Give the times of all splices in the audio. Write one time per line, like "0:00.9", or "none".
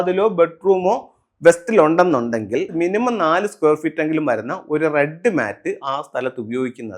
0:02.7